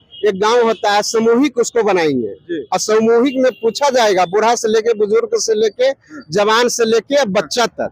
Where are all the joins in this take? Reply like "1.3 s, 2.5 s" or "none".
none